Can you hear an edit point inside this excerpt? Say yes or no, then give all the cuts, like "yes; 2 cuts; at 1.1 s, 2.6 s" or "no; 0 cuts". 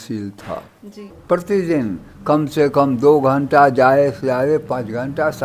no; 0 cuts